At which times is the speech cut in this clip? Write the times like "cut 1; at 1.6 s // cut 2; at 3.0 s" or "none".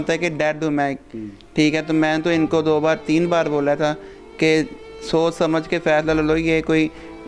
none